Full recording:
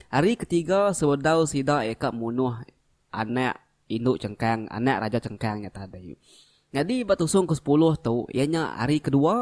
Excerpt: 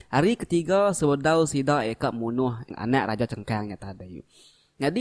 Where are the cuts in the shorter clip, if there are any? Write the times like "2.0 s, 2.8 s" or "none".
2.7 s